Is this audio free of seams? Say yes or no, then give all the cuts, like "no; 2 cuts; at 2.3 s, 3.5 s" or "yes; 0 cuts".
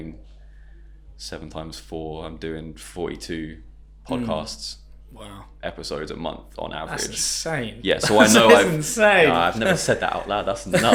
yes; 0 cuts